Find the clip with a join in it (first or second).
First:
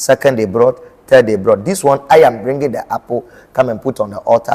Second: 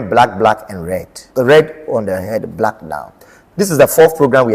second